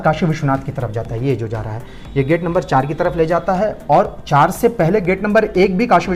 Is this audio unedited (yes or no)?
yes